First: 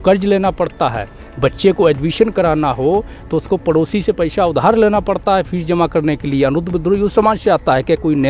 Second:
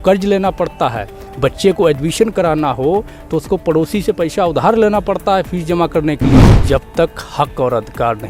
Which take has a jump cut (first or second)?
second